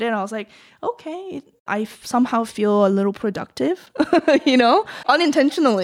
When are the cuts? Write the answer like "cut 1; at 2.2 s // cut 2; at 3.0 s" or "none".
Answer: cut 1; at 1.6 s // cut 2; at 4.9 s